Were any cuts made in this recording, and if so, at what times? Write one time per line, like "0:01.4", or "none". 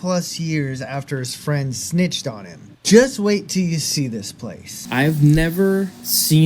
0:04.7